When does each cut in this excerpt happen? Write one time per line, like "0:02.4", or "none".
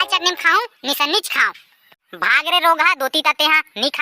none